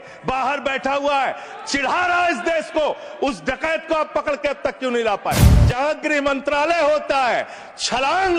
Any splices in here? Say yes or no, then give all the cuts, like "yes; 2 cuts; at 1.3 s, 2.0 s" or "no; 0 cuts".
yes; 1 cut; at 5.6 s